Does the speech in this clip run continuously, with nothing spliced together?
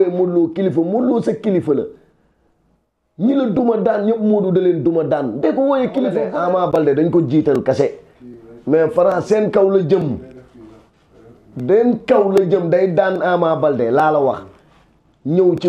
no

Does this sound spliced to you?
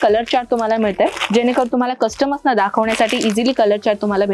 no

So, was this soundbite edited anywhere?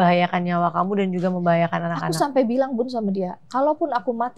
no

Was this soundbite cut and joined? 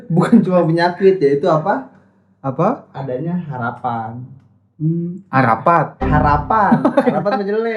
no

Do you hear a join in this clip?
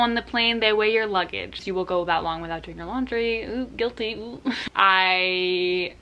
yes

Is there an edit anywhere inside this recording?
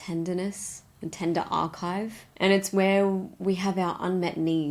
yes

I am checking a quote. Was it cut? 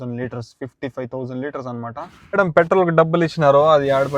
yes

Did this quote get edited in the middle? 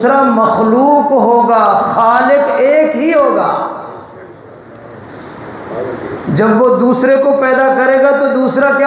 no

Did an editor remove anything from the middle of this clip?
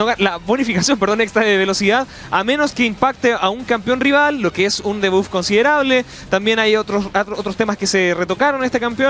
yes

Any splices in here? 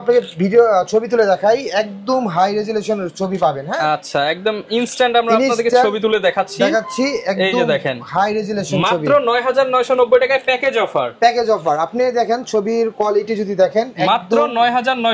no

